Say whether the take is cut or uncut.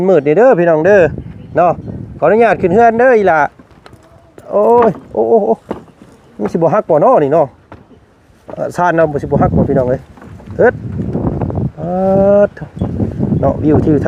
uncut